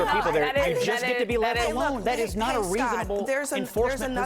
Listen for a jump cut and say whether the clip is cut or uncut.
uncut